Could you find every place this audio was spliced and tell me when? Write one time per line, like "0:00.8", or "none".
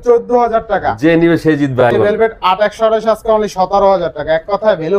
0:01.9